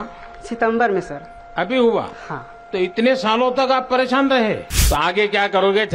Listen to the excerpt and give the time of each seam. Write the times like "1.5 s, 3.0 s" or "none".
4.8 s